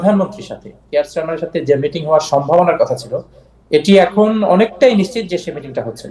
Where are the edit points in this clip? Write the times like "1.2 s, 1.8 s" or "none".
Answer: 1.0 s